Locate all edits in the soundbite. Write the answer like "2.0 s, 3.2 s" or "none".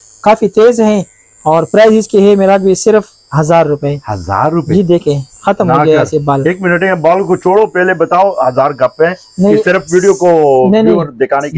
none